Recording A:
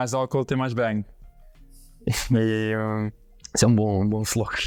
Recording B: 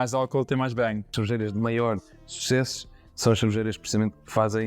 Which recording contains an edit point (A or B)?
B